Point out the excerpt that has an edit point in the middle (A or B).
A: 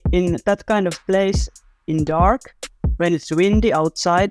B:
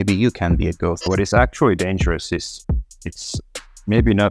B